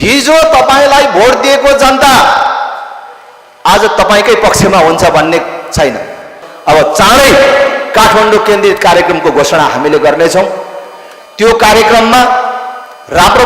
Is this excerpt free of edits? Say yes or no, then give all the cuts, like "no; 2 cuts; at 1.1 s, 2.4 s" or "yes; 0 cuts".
no; 1 cut; at 6.3 s